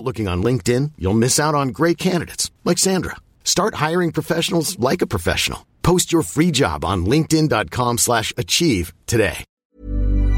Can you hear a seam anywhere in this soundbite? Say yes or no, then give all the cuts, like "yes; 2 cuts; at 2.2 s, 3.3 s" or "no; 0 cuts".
yes; 1 cut; at 9.5 s